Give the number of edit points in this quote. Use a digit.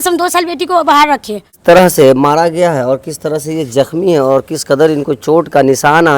1